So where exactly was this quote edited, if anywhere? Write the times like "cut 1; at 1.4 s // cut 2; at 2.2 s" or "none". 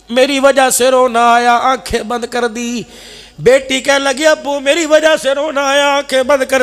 none